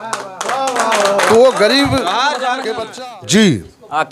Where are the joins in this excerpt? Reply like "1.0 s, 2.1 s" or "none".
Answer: 2.8 s